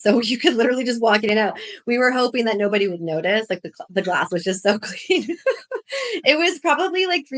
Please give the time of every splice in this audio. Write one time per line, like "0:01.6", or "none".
none